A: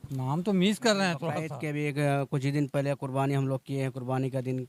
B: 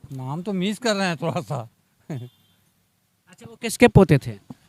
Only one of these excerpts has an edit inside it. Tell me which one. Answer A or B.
A